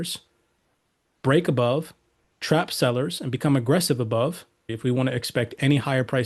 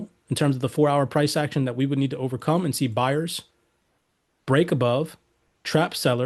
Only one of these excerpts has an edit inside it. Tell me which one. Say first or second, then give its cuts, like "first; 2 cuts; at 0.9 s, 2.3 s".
first; 1 cut; at 4.7 s